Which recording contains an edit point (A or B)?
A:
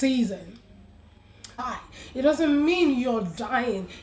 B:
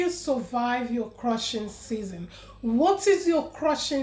A